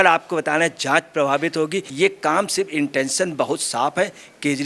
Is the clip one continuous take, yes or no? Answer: no